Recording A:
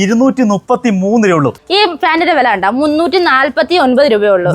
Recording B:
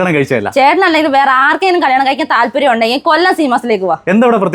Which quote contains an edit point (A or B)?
A